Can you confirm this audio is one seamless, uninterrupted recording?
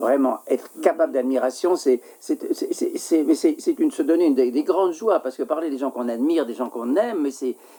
yes; 0 cuts

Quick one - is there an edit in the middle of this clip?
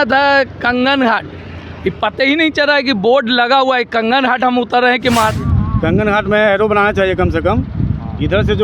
yes; 1 cut; at 5.3 s

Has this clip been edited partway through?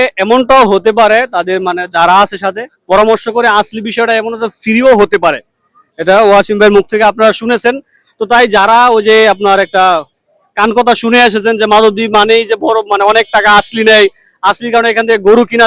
no; 0 cuts

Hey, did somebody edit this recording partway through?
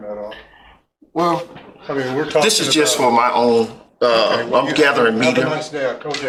no; 0 cuts

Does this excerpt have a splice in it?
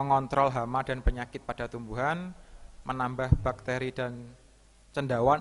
no; 0 cuts

